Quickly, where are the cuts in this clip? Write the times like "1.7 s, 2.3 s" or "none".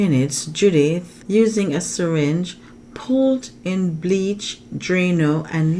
1.1 s